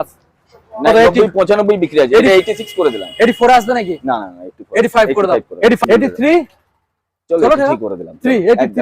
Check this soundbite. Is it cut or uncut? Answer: cut